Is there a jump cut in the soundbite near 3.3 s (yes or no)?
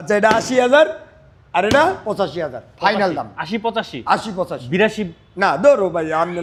no